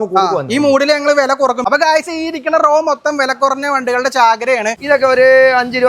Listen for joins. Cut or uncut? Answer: cut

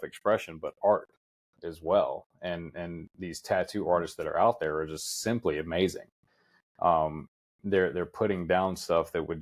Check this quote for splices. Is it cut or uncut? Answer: uncut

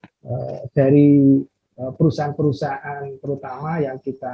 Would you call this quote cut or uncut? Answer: uncut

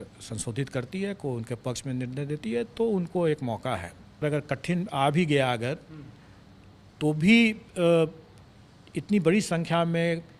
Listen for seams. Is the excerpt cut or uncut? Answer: cut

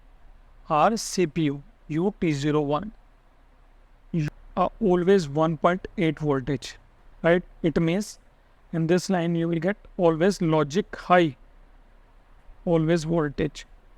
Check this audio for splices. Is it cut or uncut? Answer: cut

